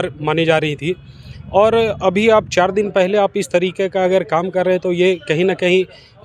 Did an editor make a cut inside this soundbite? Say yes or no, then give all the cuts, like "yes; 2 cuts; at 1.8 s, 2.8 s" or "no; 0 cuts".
no; 0 cuts